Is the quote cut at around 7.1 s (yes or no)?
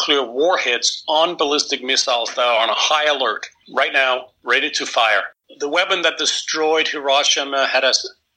no